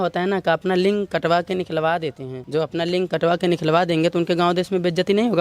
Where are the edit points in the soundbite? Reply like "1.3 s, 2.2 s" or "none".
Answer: 2.3 s

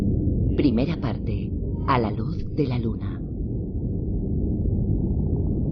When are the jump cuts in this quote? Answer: 1.9 s

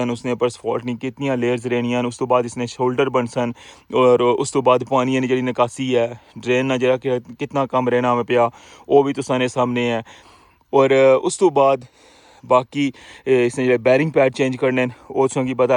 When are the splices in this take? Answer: none

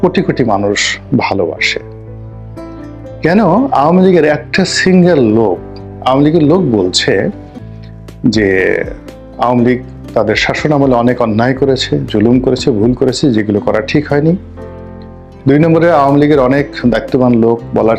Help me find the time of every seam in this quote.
none

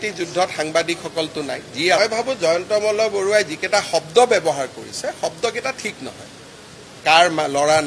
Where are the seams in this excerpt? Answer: 2.0 s

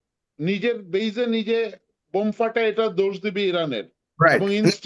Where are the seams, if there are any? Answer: none

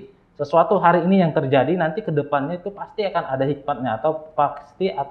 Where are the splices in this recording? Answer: none

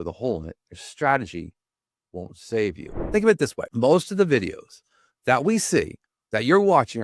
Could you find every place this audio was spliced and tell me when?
2.9 s, 3.6 s

